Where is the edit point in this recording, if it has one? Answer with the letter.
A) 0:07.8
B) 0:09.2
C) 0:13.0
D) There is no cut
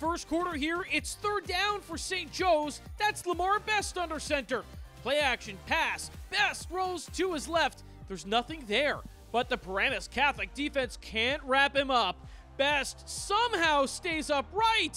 D